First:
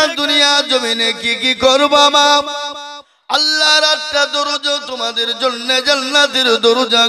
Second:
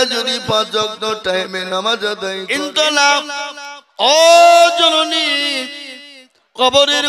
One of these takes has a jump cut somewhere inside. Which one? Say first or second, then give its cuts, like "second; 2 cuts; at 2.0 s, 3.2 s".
second; 1 cut; at 2.3 s